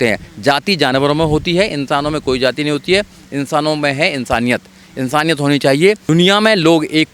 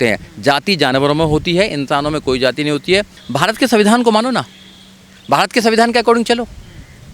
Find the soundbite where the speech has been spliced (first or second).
second